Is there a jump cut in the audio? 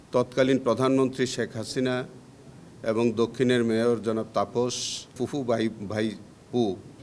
yes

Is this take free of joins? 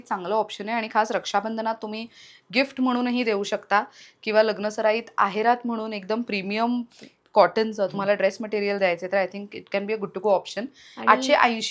yes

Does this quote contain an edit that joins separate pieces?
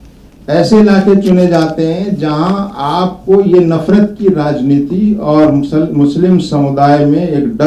no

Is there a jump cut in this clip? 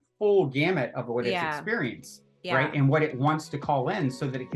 no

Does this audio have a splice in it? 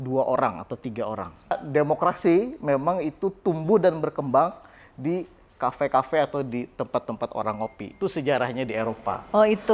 yes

